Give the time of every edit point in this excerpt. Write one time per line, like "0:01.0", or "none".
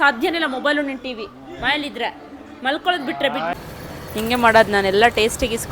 0:03.5